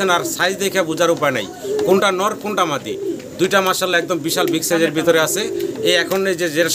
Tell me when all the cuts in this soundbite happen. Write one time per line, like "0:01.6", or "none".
none